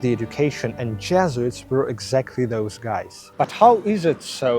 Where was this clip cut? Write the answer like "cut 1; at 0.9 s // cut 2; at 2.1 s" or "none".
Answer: cut 1; at 3.2 s